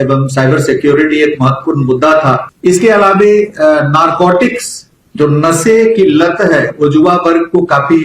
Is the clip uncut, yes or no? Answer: no